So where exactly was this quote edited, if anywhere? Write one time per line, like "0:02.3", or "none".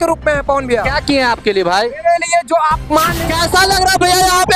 0:03.2